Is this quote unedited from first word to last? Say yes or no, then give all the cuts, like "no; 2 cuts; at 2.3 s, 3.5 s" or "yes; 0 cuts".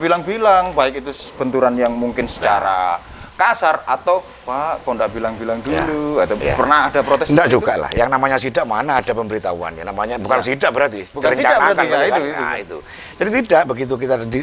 yes; 0 cuts